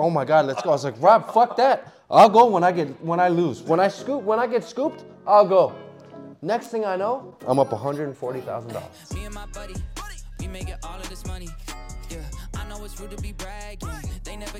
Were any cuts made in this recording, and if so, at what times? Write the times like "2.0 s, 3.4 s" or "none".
9.0 s